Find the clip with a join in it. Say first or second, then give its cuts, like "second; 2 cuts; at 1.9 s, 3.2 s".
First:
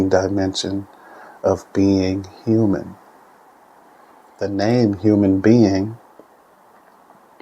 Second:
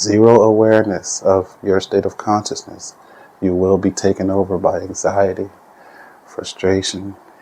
first; 1 cut; at 4.5 s